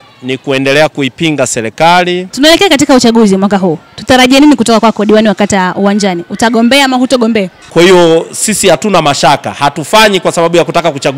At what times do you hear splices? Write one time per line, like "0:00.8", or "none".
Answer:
0:02.3
0:07.6

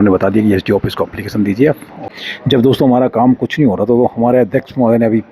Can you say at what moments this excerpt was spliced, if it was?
0:01.9

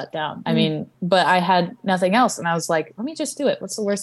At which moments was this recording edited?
0:00.9
0:02.9

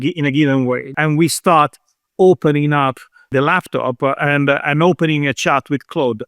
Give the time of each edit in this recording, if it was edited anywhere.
0:00.9
0:03.3

